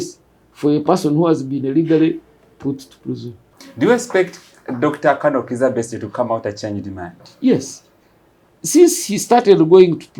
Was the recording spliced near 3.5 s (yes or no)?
yes